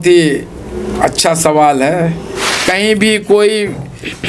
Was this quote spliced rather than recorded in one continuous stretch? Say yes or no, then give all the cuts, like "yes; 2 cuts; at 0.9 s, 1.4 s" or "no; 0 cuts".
yes; 1 cut; at 2.5 s